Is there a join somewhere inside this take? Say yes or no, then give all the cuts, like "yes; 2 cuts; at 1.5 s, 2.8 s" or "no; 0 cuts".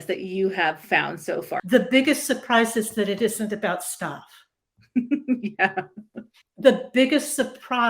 yes; 1 cut; at 1.5 s